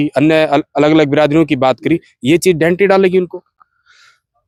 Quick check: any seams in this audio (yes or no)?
no